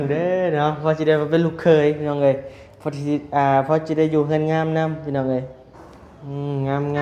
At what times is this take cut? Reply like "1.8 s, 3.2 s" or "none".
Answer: none